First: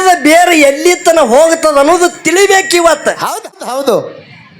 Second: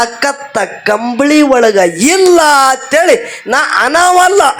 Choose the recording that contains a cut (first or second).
first